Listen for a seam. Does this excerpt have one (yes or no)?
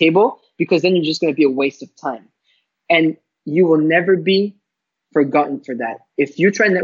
no